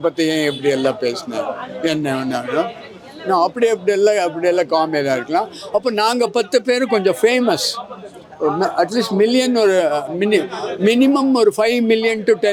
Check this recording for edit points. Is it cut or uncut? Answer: uncut